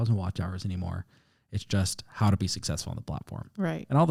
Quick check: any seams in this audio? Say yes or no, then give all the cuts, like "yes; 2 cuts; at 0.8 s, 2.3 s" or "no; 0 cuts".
no; 0 cuts